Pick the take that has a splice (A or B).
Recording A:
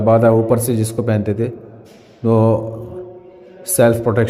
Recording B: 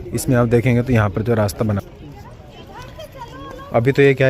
B